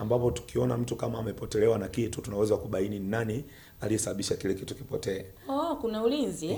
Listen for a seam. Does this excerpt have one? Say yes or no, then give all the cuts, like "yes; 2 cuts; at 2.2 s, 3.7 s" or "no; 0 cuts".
no; 0 cuts